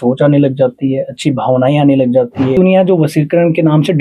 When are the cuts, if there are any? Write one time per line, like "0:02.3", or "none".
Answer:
0:02.5